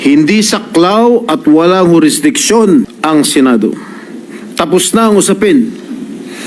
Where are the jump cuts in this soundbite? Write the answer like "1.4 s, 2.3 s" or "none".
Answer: 2.9 s